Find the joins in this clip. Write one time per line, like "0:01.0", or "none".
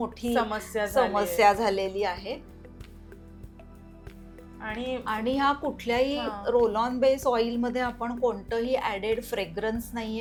none